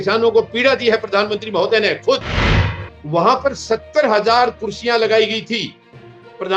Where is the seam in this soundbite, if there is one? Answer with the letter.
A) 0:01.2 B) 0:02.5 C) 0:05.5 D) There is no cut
B